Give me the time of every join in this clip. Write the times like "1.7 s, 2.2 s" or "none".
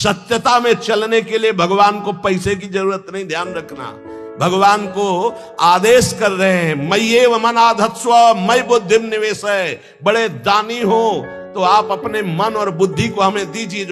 none